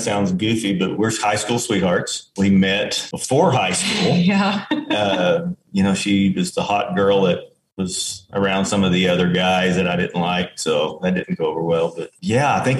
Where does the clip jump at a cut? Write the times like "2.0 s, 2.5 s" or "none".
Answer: none